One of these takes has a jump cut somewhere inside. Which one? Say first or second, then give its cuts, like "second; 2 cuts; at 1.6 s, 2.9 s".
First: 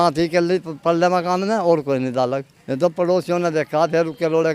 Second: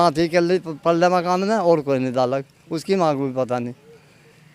first; 1 cut; at 2.5 s